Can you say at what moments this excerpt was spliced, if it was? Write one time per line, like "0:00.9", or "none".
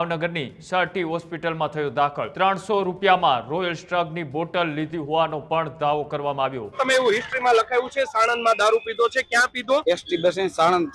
0:02.2
0:06.8
0:09.8